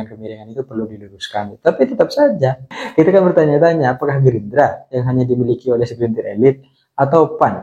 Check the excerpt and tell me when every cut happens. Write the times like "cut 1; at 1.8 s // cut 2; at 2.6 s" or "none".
cut 1; at 2.7 s